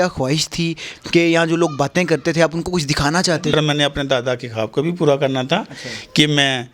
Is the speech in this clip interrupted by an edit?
yes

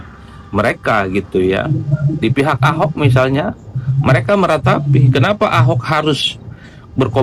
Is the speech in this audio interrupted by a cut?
no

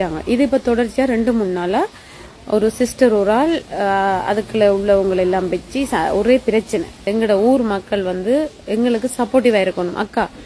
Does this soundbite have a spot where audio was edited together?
yes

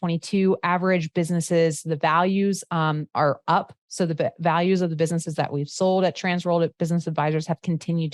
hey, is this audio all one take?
yes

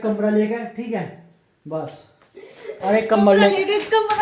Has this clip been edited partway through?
no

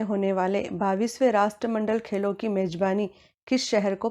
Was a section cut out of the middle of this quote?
yes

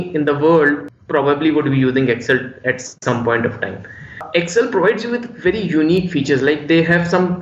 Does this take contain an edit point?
yes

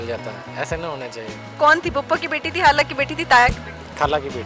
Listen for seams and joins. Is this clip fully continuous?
no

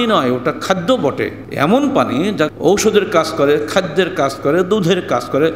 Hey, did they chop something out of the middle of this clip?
yes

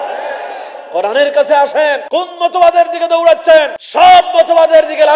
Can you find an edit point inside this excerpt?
yes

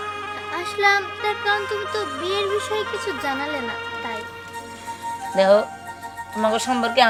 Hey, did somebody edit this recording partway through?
no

